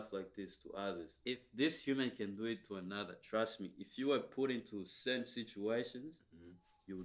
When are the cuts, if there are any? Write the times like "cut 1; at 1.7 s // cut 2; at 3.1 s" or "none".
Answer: cut 1; at 1.1 s